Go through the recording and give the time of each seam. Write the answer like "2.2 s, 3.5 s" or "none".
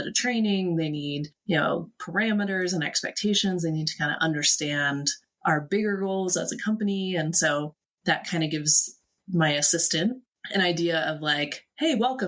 7.9 s, 10.2 s